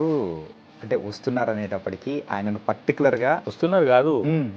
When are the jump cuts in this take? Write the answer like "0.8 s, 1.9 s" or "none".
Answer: 3.5 s